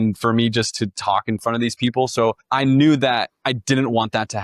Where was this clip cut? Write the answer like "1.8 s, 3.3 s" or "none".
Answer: 2.4 s, 3.3 s